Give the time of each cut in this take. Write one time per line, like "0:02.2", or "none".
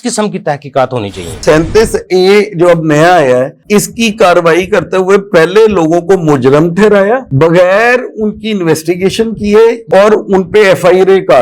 0:01.4
0:09.9